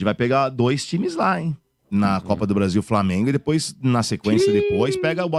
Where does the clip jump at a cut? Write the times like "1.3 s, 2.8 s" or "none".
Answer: none